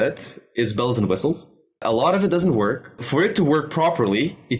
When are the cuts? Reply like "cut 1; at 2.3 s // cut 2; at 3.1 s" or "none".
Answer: cut 1; at 1.8 s // cut 2; at 3.0 s